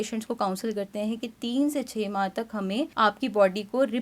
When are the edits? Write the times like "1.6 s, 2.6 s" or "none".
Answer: 2.9 s